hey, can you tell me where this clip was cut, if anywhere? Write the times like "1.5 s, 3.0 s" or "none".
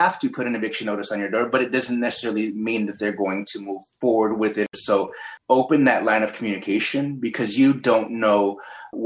4.7 s